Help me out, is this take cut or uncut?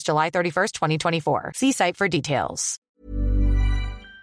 cut